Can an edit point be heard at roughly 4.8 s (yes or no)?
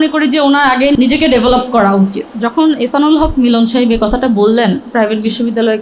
yes